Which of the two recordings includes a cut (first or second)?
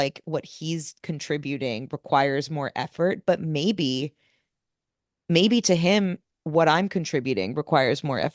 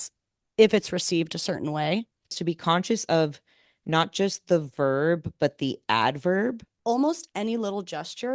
second